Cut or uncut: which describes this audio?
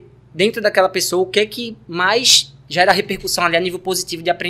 uncut